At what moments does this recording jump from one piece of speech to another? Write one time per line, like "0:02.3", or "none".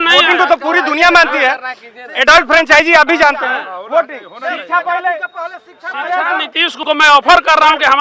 0:06.7

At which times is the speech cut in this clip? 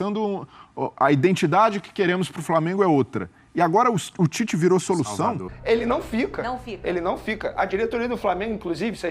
0:05.5

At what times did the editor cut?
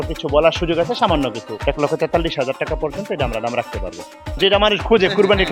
0:01.5
0:04.3

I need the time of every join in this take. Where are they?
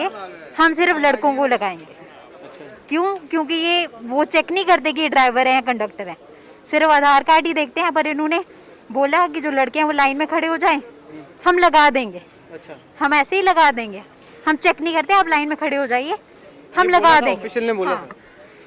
none

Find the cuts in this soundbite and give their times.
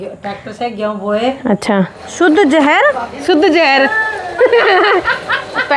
0:02.0
0:03.2

